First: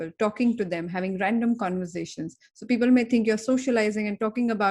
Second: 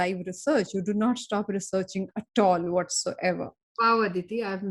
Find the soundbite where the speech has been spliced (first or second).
second